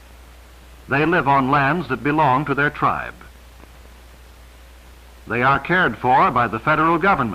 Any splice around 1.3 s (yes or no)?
no